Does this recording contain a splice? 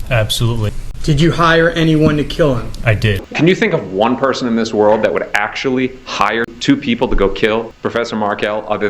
yes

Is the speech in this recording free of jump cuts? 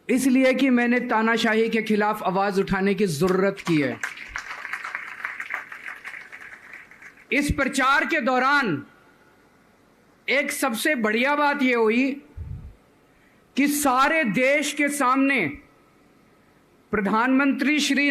yes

